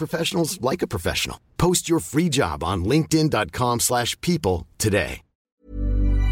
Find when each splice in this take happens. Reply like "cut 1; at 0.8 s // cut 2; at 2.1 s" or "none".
cut 1; at 5.4 s